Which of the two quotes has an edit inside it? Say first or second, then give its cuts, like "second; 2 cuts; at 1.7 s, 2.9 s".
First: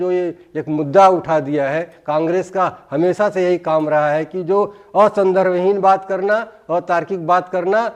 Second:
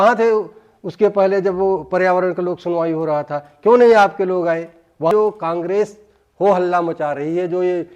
second; 1 cut; at 5.1 s